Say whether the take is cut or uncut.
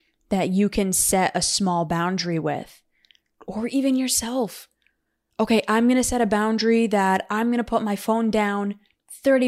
uncut